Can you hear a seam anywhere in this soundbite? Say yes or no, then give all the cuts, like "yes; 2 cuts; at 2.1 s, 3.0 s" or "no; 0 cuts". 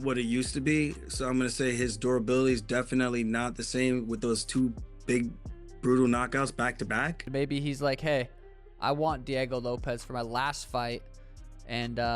yes; 1 cut; at 7.2 s